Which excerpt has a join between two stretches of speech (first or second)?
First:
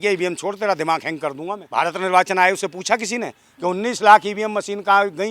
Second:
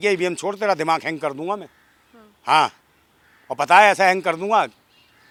first